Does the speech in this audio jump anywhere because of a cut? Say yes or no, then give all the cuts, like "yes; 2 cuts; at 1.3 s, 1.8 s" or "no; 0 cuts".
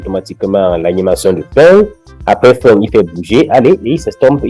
no; 0 cuts